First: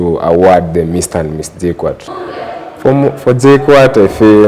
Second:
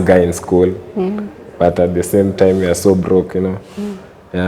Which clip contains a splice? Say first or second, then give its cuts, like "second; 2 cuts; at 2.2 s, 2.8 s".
first; 1 cut; at 2.1 s